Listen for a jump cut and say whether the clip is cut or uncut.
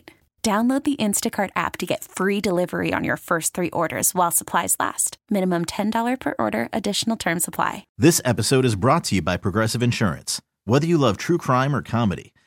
cut